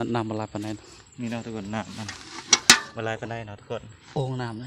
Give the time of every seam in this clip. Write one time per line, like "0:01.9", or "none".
none